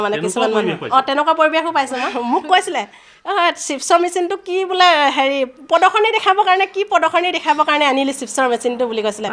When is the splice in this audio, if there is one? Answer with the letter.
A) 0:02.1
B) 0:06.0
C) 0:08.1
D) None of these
A